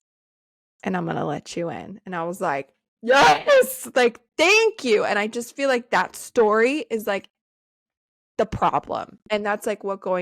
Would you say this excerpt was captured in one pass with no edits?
no; 1 cut; at 9.2 s

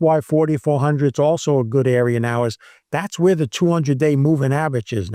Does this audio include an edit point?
no; 0 cuts

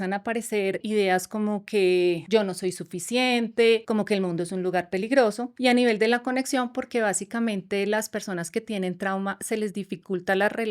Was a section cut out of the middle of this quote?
yes; 4 cuts; at 0.8 s, 2.2 s, 3.8 s, 5.5 s

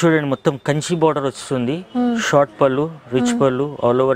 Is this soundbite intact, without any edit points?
yes; 0 cuts

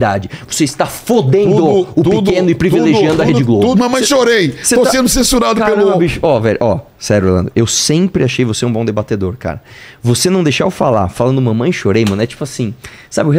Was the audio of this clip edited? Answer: yes; 1 cut; at 3.7 s

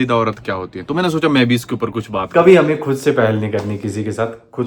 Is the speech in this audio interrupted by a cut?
yes; 1 cut; at 2.1 s

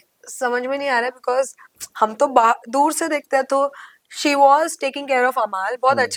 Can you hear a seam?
no; 0 cuts

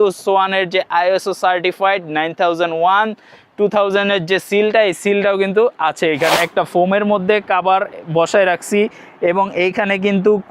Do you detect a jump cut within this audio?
yes; 1 cut; at 6.3 s

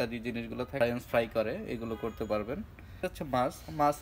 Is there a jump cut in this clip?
yes; 2 cuts; at 0.8 s, 3.0 s

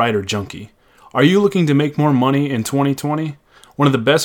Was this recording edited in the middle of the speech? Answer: no; 0 cuts

